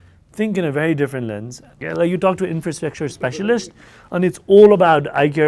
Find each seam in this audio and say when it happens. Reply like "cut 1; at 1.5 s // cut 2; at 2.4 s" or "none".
cut 1; at 1.8 s